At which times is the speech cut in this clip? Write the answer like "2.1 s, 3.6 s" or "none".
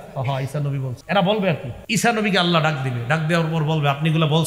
0.9 s, 1.7 s